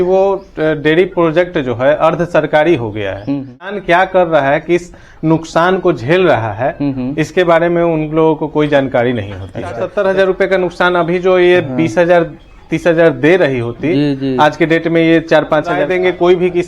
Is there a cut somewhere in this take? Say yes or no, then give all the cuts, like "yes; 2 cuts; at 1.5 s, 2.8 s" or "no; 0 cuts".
yes; 3 cuts; at 3.7 s, 9.8 s, 15.8 s